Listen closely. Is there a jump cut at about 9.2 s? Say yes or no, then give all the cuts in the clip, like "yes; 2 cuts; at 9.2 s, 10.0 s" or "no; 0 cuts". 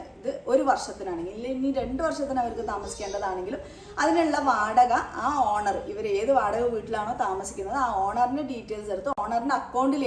no; 0 cuts